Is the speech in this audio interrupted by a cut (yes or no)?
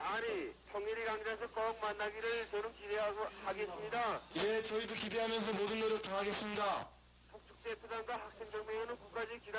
no